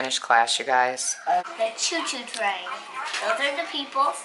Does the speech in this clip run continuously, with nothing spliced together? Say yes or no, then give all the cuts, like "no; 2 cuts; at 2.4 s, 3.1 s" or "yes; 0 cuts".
no; 1 cut; at 1.5 s